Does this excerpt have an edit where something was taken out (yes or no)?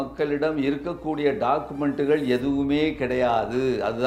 no